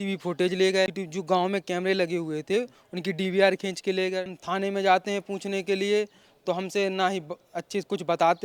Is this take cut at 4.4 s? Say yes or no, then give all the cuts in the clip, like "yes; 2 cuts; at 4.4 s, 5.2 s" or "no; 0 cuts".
yes; 2 cuts; at 0.9 s, 4.4 s